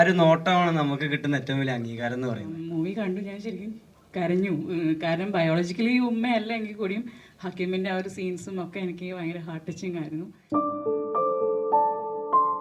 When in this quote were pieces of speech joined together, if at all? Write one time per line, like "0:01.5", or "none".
0:02.6
0:10.4